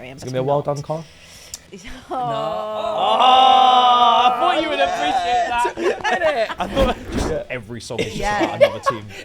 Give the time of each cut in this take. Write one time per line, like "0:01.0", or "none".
0:07.1